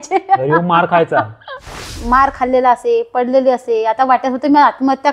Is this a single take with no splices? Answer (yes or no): no